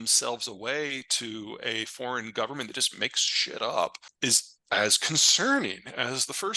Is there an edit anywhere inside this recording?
yes; 1 cut; at 4.1 s

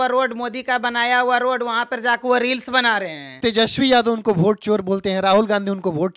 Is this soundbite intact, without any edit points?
no; 1 cut; at 3.2 s

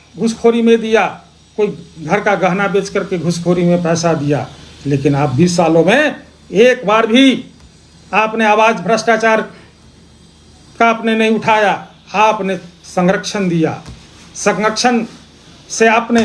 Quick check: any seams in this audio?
no; 0 cuts

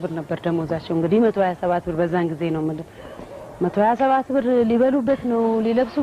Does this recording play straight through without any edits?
yes; 0 cuts

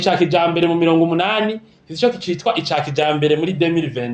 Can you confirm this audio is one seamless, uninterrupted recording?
yes; 0 cuts

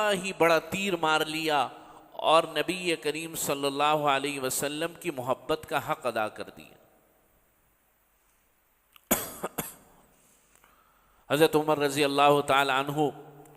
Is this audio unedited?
yes; 0 cuts

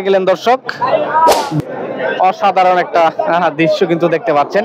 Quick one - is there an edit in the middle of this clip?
yes; 1 cut; at 1.6 s

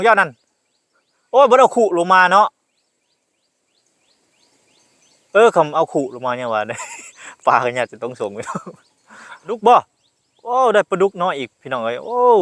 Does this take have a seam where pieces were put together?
yes; 1 cut; at 9.6 s

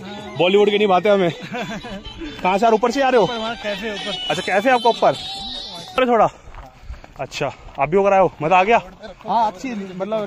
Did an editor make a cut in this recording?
yes; 1 cut; at 5.8 s

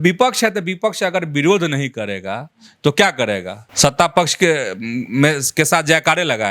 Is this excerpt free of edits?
no; 1 cut; at 3.6 s

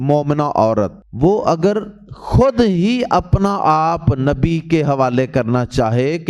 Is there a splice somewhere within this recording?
yes; 1 cut; at 1.0 s

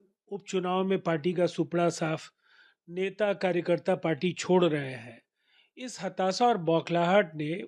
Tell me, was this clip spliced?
no; 0 cuts

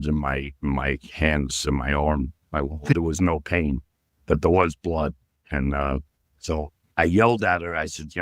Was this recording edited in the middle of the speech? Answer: yes; 1 cut; at 3.0 s

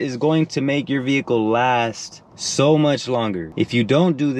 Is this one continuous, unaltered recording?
yes; 0 cuts

